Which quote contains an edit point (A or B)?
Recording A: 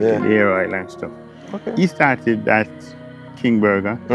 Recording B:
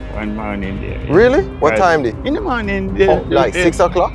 B